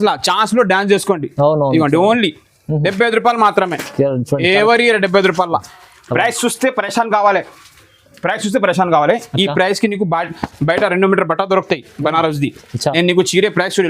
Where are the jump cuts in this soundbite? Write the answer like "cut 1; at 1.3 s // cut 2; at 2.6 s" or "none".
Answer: cut 1; at 5.6 s

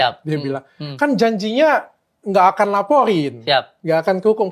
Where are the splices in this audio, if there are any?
none

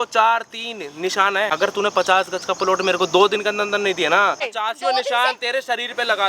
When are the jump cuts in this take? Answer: cut 1; at 1.5 s // cut 2; at 4.5 s

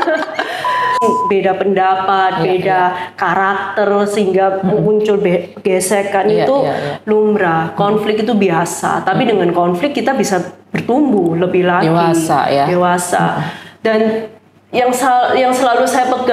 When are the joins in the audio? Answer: cut 1; at 1.0 s

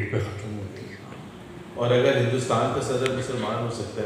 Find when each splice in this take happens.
cut 1; at 1.1 s

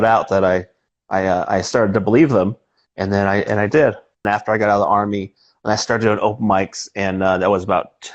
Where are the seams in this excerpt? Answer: cut 1; at 4.2 s

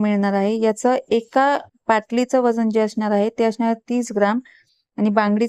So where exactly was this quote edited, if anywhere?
none

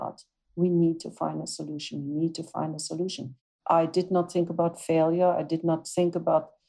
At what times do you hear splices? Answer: cut 1; at 3.5 s

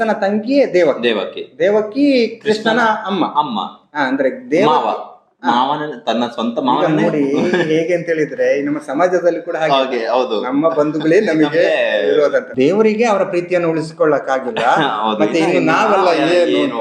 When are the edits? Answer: cut 1; at 12.5 s

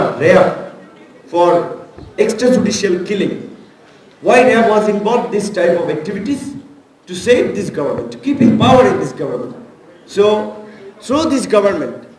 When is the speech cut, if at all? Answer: none

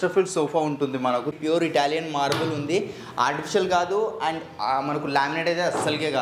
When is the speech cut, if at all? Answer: cut 1; at 1.4 s

